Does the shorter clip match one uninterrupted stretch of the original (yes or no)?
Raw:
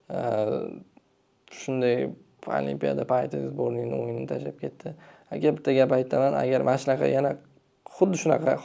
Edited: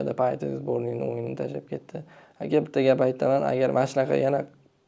yes